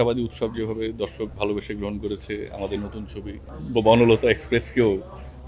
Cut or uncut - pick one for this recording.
uncut